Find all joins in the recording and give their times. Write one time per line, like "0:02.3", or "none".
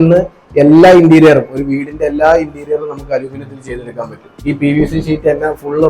0:04.3